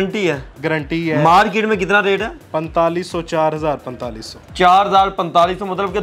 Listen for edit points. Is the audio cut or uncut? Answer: uncut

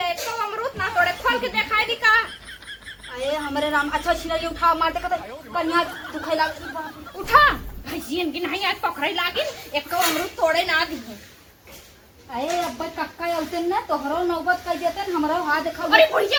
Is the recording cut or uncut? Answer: uncut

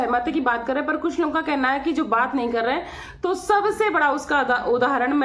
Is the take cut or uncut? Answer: uncut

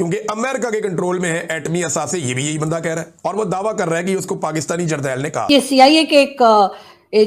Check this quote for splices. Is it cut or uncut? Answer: cut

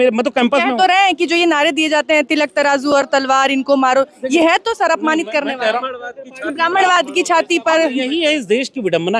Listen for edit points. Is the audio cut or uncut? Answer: uncut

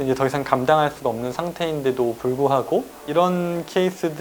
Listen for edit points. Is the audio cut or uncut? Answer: uncut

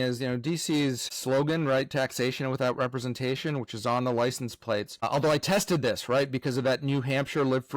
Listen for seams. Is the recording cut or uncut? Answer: cut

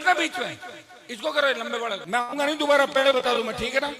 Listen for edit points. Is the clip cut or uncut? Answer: cut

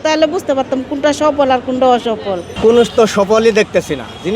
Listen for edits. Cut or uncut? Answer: cut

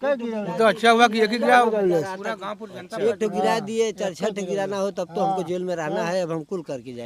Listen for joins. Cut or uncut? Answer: uncut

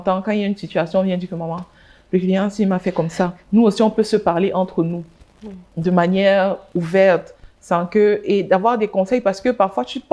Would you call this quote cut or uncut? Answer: uncut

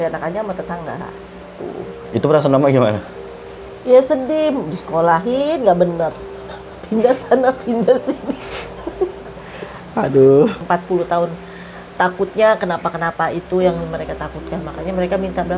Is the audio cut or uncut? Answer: cut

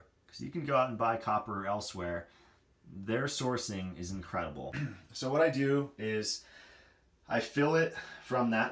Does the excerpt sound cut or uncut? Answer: cut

